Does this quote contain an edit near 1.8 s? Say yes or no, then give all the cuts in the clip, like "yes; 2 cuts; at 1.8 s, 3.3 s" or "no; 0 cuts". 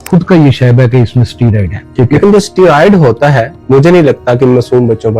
yes; 2 cuts; at 1.8 s, 3.5 s